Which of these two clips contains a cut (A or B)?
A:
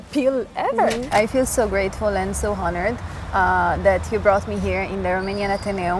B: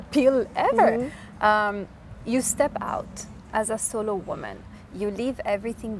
A